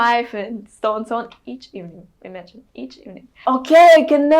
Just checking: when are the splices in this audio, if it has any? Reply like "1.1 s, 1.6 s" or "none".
3.4 s